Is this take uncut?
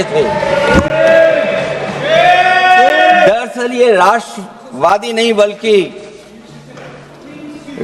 yes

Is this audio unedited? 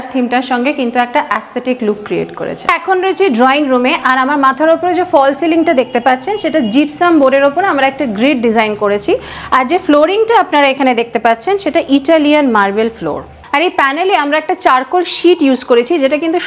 yes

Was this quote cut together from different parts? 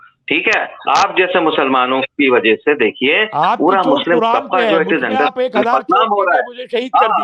no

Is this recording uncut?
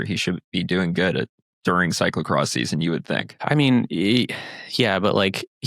no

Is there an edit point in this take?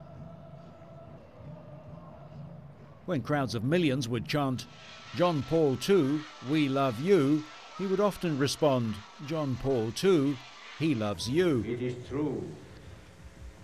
no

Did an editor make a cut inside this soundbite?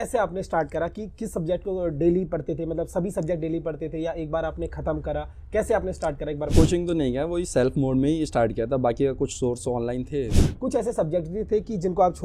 yes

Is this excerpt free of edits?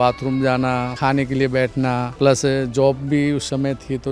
no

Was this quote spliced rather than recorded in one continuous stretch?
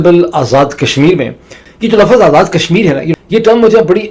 yes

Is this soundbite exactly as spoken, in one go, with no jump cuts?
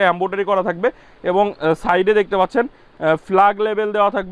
yes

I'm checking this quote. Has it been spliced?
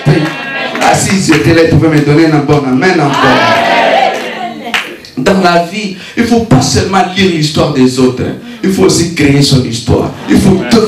no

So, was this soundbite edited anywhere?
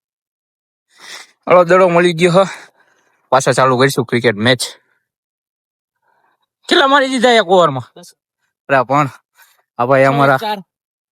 no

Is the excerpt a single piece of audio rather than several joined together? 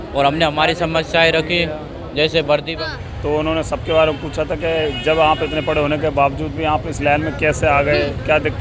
no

